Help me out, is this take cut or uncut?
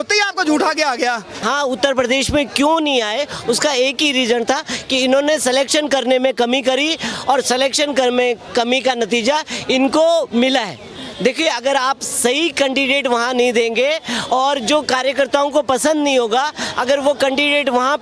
cut